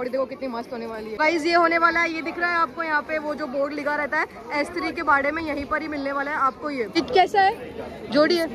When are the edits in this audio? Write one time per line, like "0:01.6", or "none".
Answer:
0:01.2
0:07.0